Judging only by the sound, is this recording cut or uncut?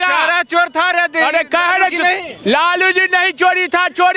uncut